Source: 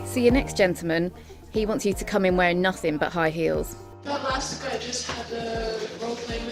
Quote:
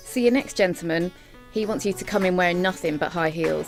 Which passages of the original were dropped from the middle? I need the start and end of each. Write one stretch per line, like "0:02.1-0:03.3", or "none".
none